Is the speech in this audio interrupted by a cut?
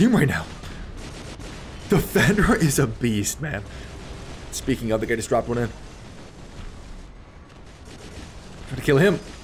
no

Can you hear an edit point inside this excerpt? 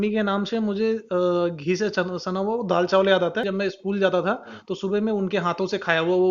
yes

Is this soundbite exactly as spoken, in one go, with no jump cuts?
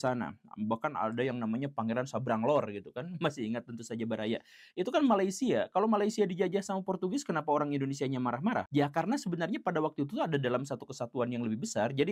no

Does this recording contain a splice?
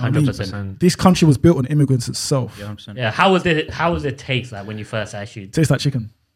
yes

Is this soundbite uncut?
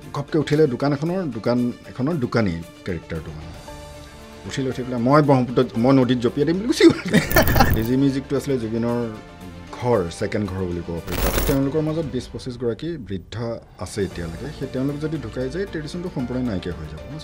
no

